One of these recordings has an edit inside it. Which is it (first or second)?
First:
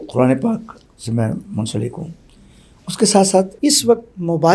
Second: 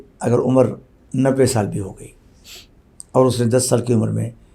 first